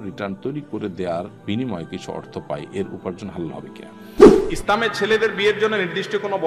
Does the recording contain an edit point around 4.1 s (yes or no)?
yes